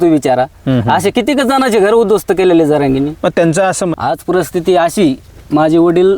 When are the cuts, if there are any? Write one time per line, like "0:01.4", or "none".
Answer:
0:03.8